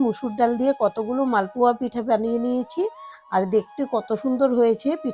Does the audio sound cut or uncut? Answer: uncut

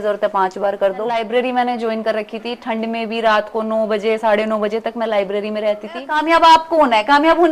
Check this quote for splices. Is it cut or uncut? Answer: cut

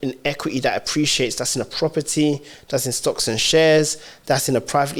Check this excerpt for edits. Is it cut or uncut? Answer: uncut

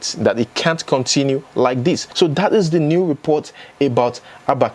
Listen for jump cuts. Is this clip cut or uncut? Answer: uncut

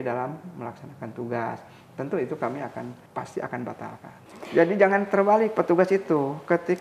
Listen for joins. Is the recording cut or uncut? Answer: cut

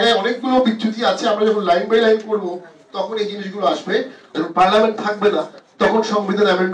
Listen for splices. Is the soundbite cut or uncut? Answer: cut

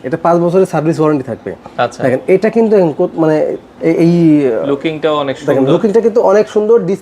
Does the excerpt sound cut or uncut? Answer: uncut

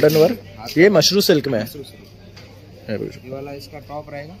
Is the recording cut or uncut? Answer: uncut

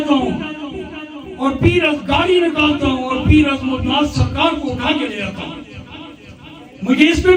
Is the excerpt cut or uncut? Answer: uncut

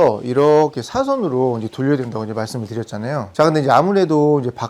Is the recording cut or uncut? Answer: uncut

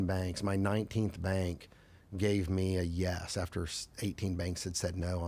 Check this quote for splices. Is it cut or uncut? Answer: uncut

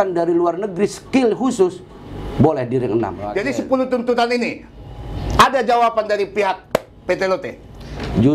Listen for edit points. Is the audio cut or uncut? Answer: cut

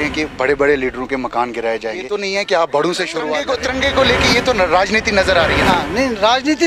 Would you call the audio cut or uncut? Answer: cut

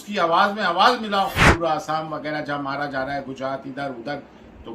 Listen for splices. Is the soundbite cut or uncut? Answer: cut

